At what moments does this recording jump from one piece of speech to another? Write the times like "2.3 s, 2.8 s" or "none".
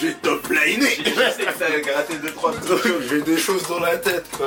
none